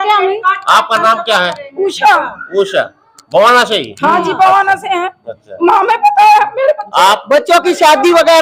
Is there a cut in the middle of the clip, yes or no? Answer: no